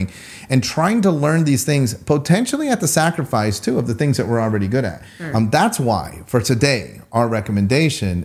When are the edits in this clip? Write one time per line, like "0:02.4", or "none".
0:05.1